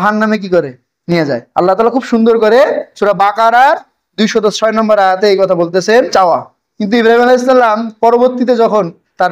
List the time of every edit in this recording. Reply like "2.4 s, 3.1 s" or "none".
6.1 s